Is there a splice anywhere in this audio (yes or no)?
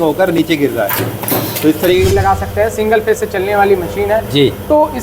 yes